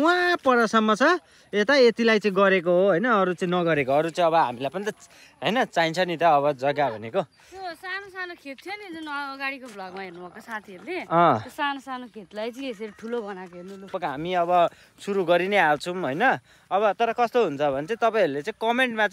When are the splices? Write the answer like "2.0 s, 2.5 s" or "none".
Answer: 13.9 s